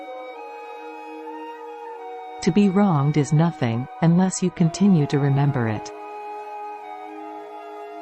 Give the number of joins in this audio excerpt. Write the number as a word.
two